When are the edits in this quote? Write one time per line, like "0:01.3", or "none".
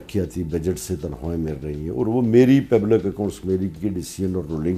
none